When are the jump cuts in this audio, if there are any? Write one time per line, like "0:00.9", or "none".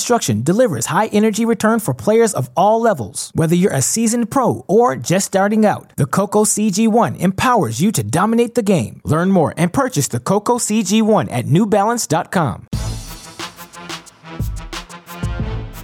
0:12.7